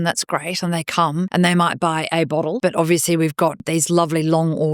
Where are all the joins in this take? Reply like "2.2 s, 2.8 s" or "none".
1.3 s, 2.6 s, 3.6 s